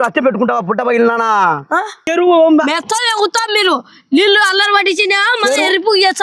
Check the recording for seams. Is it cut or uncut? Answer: cut